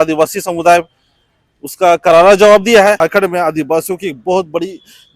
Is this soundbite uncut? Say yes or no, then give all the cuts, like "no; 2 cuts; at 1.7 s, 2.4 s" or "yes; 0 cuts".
no; 1 cut; at 3.0 s